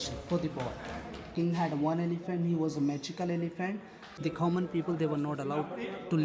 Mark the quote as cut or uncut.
cut